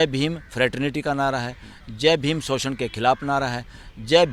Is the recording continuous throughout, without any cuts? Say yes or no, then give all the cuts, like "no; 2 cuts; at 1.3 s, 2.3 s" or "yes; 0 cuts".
yes; 0 cuts